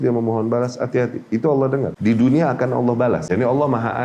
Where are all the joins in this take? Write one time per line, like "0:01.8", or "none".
0:01.9
0:03.3